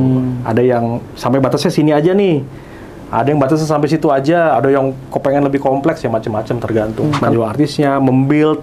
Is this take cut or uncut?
cut